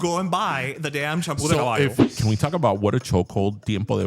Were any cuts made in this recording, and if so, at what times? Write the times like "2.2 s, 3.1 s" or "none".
2.1 s